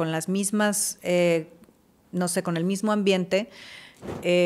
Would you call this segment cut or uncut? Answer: uncut